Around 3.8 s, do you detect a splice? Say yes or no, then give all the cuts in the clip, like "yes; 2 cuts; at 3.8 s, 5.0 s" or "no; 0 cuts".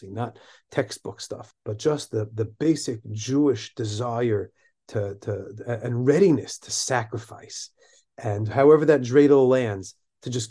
no; 1 cut; at 1.4 s